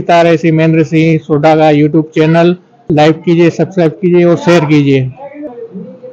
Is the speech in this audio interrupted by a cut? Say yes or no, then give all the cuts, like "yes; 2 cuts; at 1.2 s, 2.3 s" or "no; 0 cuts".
yes; 3 cuts; at 1.6 s, 2.8 s, 5.5 s